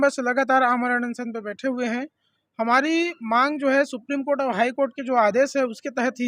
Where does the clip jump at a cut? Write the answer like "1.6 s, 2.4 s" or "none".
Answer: none